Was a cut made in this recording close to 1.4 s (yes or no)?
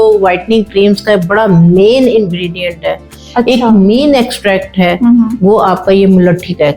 no